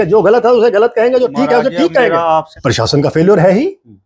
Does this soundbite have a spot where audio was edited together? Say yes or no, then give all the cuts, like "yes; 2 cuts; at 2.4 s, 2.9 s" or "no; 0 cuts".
yes; 1 cut; at 2.5 s